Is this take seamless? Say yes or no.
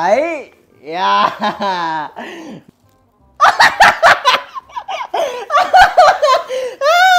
no